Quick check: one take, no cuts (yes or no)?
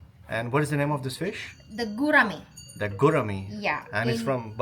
yes